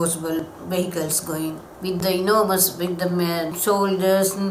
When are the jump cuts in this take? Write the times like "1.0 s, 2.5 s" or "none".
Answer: 1.7 s, 3.5 s